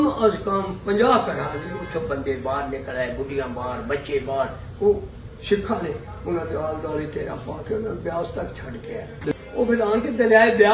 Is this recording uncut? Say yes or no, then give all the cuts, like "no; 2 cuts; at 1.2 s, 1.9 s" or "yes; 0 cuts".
no; 1 cut; at 9.3 s